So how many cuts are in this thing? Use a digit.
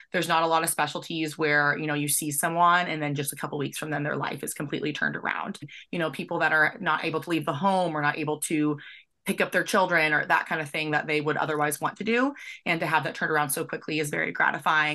1